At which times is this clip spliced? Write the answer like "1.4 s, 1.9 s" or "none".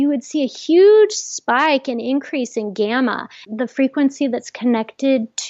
3.4 s